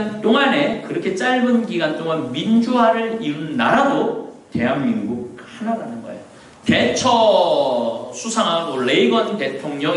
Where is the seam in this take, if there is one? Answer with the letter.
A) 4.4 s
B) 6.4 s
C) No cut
B